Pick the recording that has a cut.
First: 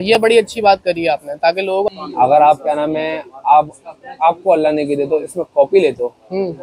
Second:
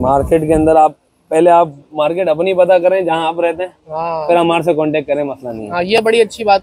first; 1 cut; at 1.9 s

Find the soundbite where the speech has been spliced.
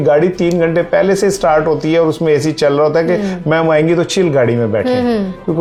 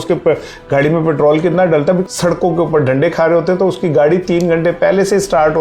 second; 1 cut; at 2.0 s

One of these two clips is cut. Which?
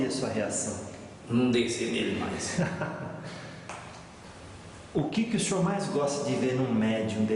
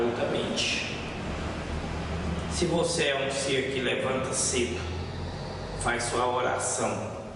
first; 1 cut; at 4.2 s

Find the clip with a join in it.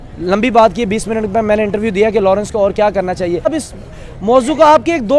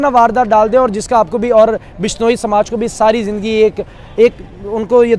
first; 1 cut; at 3.5 s

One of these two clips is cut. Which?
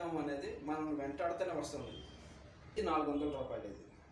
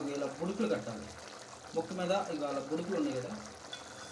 first; 1 cut; at 2.8 s

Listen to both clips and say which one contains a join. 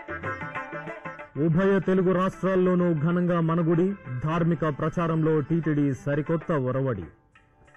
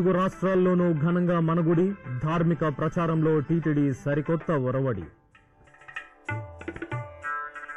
first; 1 cut; at 1.1 s

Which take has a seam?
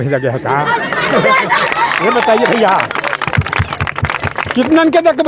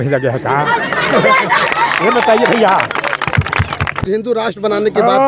second; 1 cut; at 4.1 s

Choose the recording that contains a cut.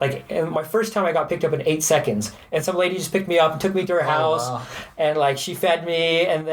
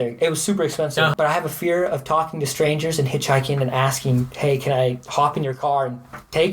second; 1 cut; at 1.1 s

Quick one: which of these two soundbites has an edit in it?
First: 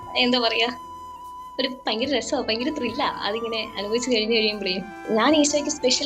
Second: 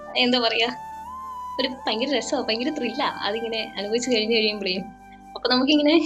first; 1 cut; at 4.9 s

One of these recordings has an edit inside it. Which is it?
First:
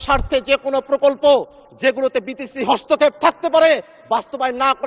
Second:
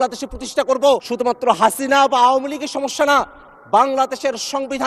second; 1 cut; at 1.1 s

